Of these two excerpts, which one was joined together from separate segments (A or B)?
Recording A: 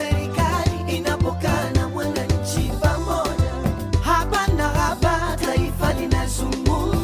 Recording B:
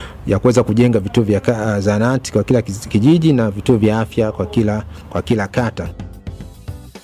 B